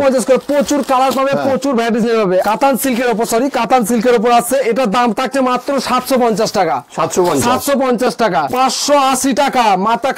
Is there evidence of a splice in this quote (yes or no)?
yes